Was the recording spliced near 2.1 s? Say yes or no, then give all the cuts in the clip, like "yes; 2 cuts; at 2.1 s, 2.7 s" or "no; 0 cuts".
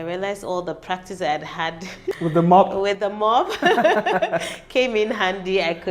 yes; 1 cut; at 2.1 s